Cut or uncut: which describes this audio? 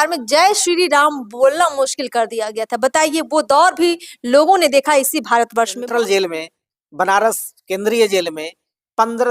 cut